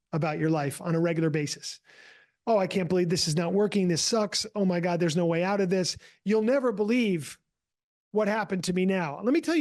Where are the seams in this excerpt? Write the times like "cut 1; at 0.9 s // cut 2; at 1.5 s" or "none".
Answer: none